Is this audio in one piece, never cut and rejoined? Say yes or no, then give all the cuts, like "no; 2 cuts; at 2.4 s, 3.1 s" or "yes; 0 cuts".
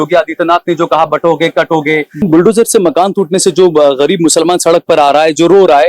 no; 1 cut; at 2.2 s